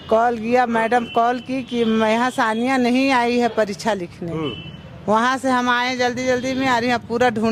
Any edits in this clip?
no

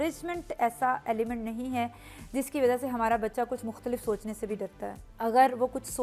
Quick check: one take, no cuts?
yes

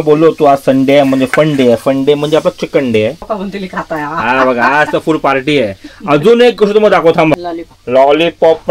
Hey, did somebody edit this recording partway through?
yes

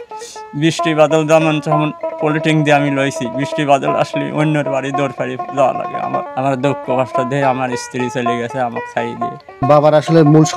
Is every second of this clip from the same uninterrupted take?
no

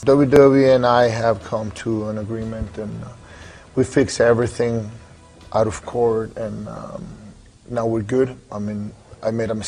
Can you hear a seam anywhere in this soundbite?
no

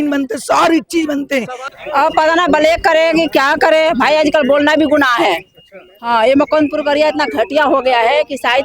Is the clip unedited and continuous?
no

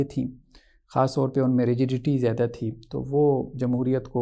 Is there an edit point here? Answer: no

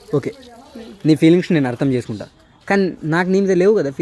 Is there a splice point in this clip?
no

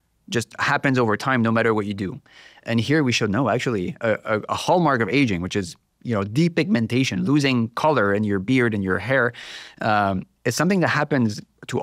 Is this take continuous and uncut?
yes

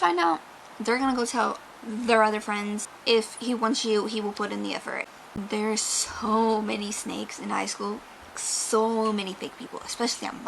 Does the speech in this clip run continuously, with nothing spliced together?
no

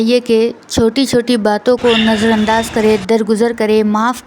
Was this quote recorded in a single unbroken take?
yes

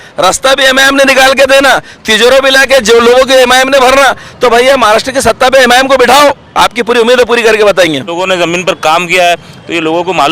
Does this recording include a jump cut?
yes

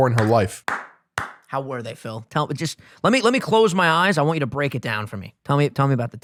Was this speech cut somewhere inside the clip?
no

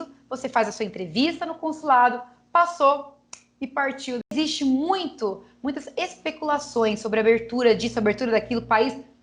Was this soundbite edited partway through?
yes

